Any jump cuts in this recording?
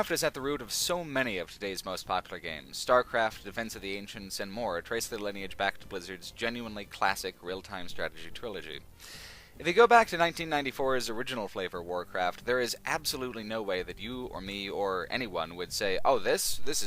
no; 0 cuts

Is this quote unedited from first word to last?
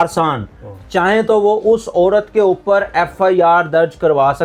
yes; 0 cuts

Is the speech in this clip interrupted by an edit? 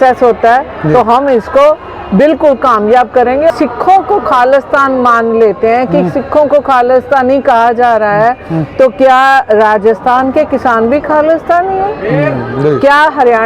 yes; 1 cut; at 3.5 s

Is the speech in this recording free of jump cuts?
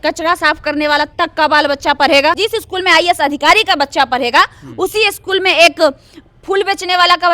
no; 1 cut; at 2.4 s

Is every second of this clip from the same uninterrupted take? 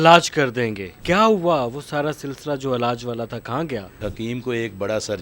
no; 1 cut; at 4.1 s

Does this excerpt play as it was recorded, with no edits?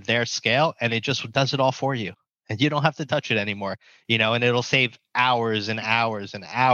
yes; 0 cuts

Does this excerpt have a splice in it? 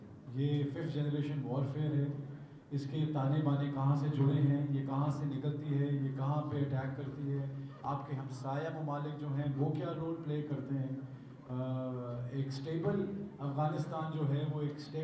no; 0 cuts

